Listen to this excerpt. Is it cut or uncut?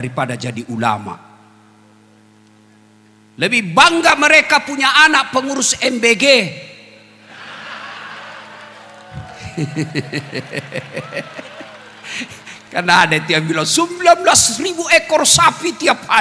uncut